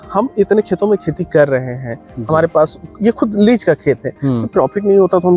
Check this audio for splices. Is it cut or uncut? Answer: uncut